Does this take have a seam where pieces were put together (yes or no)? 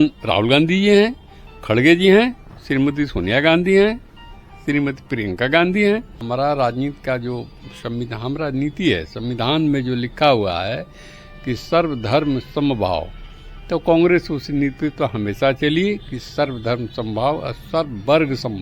yes